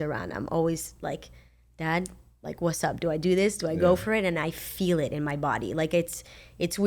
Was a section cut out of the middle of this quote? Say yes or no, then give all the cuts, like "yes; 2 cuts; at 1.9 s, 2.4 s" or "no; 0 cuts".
no; 0 cuts